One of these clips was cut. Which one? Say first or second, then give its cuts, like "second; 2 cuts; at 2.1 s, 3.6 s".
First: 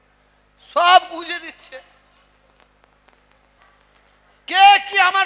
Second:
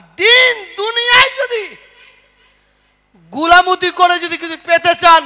first; 1 cut; at 3.6 s